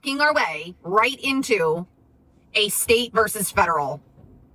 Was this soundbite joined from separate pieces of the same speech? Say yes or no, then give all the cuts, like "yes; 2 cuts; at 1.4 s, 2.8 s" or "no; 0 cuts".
no; 0 cuts